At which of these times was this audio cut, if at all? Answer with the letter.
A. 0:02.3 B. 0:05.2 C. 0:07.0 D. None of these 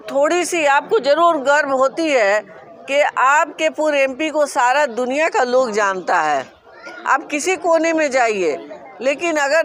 D